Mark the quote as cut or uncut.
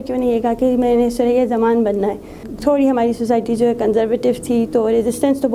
cut